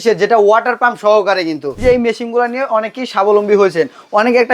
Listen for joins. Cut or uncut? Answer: cut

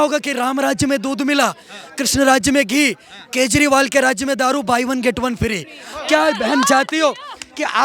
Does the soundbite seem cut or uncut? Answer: uncut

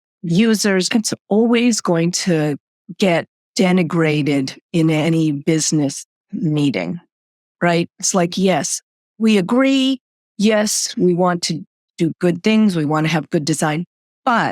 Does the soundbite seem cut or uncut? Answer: uncut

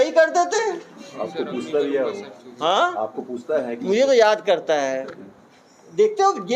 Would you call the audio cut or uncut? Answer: uncut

